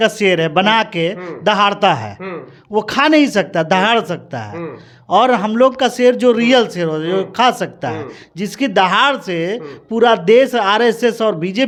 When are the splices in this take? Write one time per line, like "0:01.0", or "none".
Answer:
none